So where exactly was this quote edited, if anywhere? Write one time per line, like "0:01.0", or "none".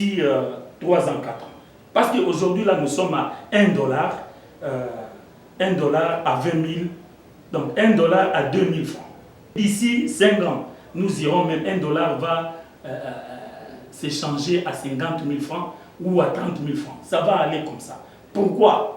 0:09.5